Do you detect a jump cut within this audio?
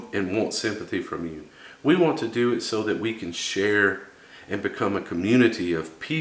no; 0 cuts

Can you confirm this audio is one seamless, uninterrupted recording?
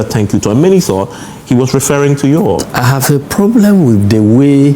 no; 1 cut; at 2.7 s

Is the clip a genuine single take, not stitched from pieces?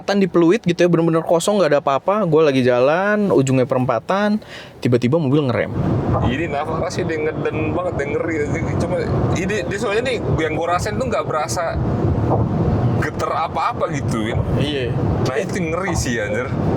no; 1 cut; at 5.8 s

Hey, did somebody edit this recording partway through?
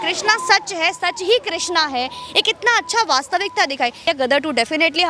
yes; 1 cut; at 4.0 s

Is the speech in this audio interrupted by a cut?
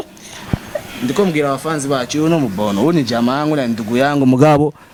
no; 0 cuts

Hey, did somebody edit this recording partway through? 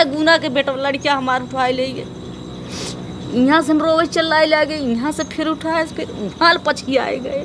no; 0 cuts

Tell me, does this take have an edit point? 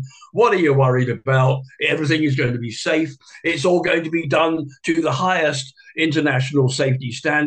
yes; 1 cut; at 1.2 s

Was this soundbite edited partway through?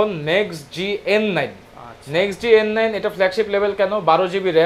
no; 0 cuts

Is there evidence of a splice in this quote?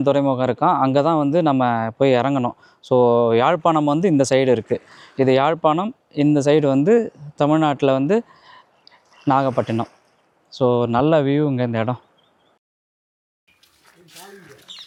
no; 0 cuts

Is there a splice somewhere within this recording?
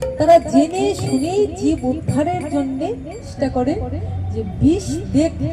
yes; 1 cut; at 3.3 s

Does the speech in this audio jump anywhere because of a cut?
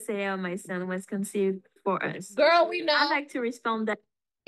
no; 0 cuts

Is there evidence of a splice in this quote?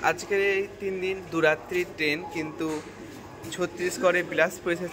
no; 0 cuts

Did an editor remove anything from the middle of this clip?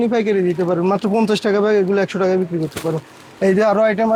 no; 0 cuts

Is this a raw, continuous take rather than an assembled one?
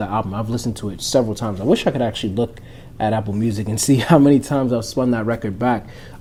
yes; 0 cuts

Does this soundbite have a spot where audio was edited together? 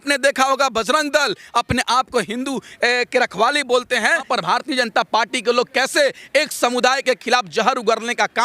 yes; 1 cut; at 4.3 s

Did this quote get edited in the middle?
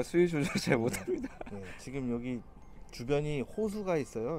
no; 0 cuts

